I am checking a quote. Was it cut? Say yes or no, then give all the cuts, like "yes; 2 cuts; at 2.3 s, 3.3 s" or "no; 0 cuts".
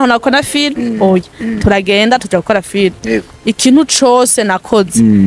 no; 0 cuts